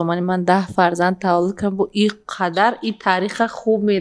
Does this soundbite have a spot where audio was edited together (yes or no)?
no